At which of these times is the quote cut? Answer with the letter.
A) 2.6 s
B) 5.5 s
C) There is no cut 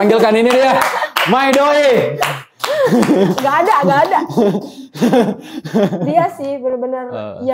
C